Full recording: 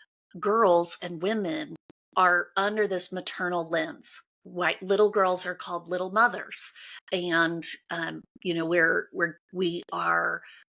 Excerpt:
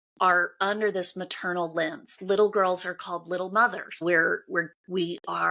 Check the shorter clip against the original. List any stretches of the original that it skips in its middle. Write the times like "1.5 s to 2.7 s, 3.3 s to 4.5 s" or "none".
4.1 s to 4.8 s, 6.6 s to 8.7 s